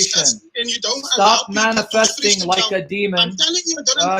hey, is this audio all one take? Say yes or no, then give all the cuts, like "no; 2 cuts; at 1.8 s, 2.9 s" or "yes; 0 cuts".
yes; 0 cuts